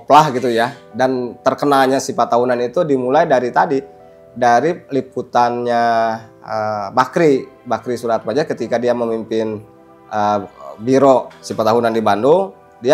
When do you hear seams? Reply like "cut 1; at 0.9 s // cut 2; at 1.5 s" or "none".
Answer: none